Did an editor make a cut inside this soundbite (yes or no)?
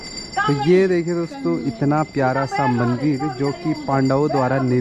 no